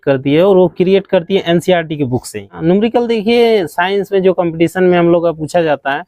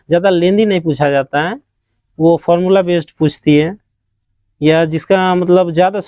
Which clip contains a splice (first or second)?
first